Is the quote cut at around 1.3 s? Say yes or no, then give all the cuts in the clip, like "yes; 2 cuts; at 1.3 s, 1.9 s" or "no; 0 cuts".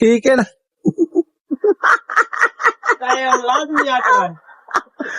no; 0 cuts